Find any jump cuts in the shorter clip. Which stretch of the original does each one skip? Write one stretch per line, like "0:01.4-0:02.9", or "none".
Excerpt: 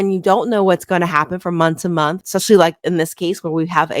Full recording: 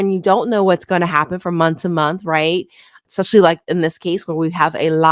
0:02.2-0:03.0